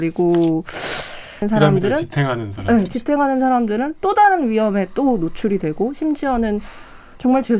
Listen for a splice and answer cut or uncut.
cut